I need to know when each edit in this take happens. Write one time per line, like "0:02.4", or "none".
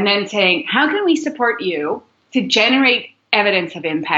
none